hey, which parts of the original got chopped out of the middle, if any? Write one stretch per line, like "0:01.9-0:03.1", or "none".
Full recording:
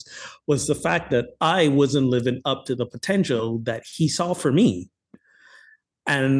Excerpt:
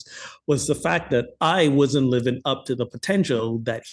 none